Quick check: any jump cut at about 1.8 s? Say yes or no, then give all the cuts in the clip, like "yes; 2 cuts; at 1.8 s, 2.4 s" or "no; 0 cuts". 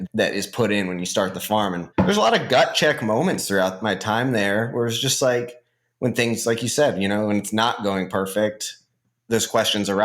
yes; 1 cut; at 1.8 s